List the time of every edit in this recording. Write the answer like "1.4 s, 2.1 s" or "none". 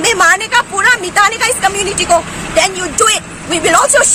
none